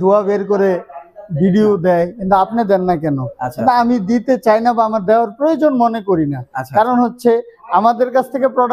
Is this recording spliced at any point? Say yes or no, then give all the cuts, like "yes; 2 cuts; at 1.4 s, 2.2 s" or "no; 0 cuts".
no; 0 cuts